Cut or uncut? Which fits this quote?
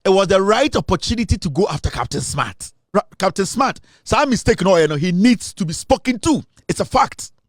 cut